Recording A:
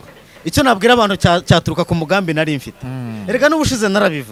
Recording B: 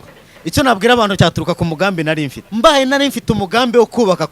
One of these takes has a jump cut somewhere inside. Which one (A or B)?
B